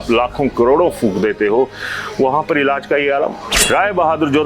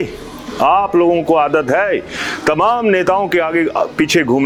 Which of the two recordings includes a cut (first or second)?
first